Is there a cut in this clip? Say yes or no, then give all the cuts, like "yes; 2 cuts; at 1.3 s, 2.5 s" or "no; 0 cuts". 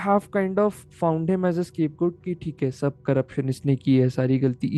no; 0 cuts